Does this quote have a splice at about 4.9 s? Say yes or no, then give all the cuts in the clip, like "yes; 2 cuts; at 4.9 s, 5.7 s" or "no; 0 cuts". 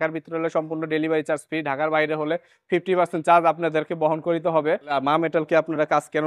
yes; 1 cut; at 4.9 s